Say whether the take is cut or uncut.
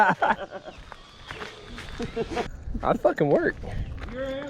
cut